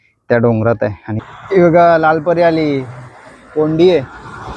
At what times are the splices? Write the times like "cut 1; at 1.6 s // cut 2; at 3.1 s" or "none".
cut 1; at 1.1 s